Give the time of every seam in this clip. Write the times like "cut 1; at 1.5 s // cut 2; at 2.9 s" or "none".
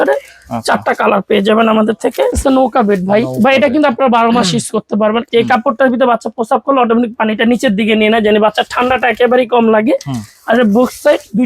cut 1; at 2.4 s // cut 2; at 5.2 s